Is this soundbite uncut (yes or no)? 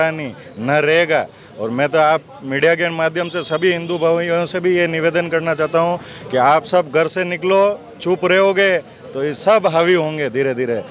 yes